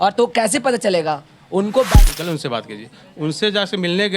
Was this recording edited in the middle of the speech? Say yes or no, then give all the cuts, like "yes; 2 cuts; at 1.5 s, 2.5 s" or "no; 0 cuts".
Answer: yes; 1 cut; at 1.9 s